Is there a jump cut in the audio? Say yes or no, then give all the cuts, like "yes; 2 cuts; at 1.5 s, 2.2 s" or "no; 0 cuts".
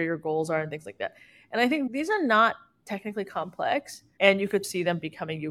yes; 2 cuts; at 1.9 s, 4.7 s